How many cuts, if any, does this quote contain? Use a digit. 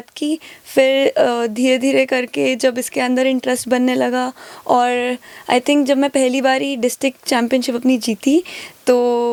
0